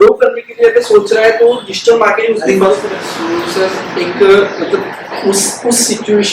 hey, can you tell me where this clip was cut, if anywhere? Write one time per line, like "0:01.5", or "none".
0:02.8